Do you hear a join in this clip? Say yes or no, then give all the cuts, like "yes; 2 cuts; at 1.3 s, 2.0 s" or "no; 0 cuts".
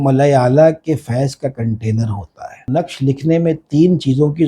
yes; 1 cut; at 2.6 s